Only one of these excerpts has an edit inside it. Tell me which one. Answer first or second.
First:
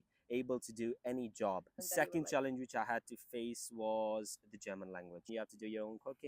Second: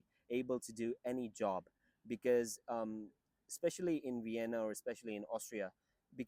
first